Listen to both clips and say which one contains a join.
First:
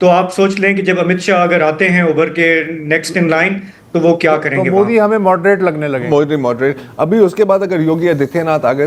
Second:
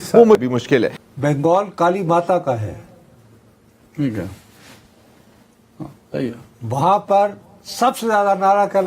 second; 1 cut; at 1.0 s

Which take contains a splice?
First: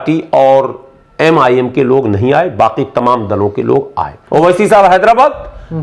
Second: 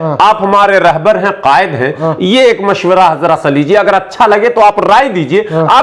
first; 1 cut; at 4.2 s

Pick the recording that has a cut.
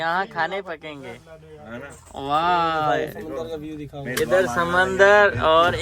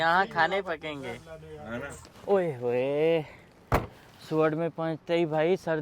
second; 1 cut; at 2.1 s

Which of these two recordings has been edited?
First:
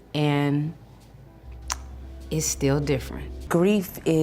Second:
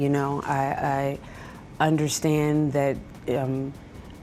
first; 1 cut; at 3.3 s

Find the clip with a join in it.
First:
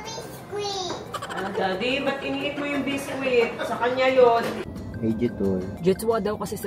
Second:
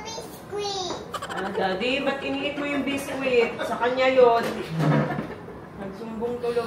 first; 2 cuts; at 4.6 s, 5.7 s

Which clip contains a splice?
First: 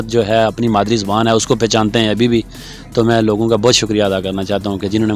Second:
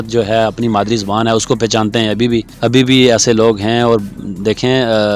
second; 1 cut; at 2.5 s

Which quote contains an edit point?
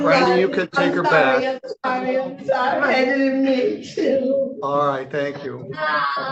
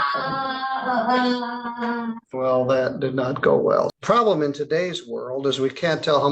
second; 2 cuts; at 2.2 s, 3.9 s

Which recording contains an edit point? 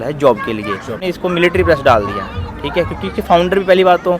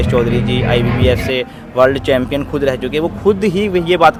first; 1 cut; at 1.0 s

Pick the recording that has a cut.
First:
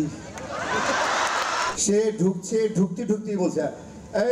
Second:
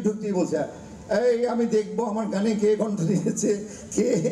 first; 1 cut; at 1.7 s

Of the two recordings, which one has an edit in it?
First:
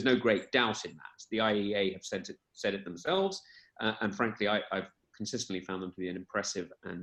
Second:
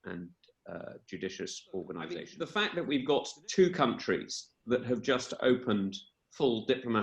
second; 1 cut; at 2.4 s

